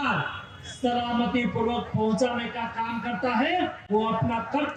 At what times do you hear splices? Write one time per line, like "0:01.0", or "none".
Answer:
none